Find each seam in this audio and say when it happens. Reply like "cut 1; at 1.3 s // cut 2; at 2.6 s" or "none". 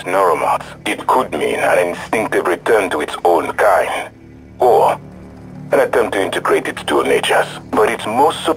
none

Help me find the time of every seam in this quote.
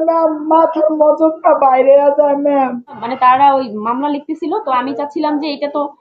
cut 1; at 3.1 s

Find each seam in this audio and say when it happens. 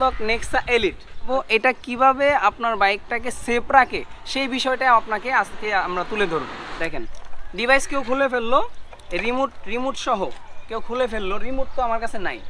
cut 1; at 1.3 s // cut 2; at 6.6 s

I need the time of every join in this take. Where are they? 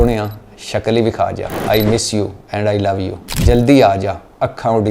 cut 1; at 1.5 s // cut 2; at 3.2 s

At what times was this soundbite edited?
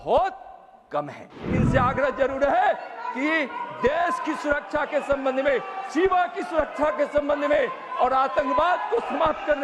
cut 1; at 1.5 s

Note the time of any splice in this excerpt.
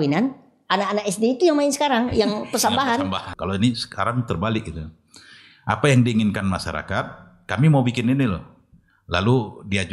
cut 1; at 3.3 s

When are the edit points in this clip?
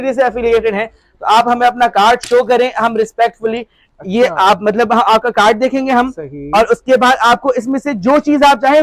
none

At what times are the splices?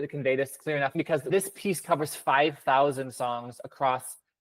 cut 1; at 0.9 s

